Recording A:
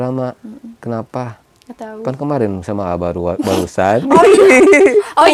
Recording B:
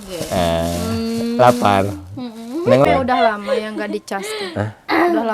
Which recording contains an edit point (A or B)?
B